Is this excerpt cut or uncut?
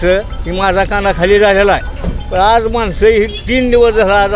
uncut